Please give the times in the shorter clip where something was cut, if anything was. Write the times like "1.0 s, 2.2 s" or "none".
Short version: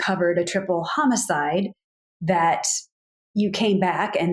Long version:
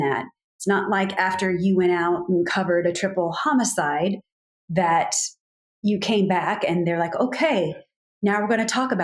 none